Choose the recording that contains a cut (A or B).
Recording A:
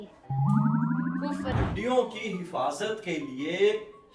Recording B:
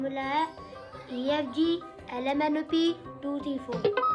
A